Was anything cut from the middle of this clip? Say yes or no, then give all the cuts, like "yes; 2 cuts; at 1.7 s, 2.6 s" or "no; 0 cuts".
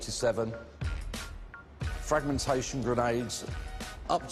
no; 0 cuts